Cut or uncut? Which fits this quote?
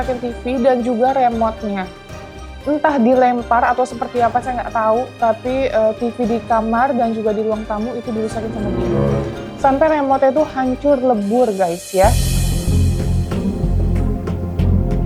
uncut